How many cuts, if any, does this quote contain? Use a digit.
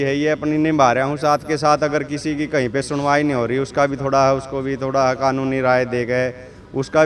0